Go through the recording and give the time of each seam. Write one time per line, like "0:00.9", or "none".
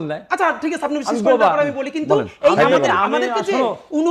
none